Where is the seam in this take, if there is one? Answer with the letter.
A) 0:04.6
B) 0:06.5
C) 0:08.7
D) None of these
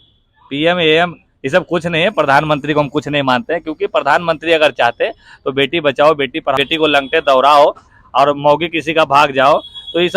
B